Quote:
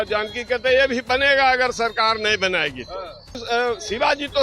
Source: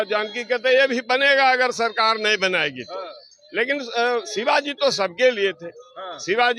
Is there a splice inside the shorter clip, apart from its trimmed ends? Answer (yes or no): yes